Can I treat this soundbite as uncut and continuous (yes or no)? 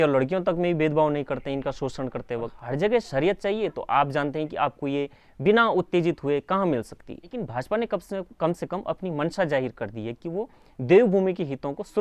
no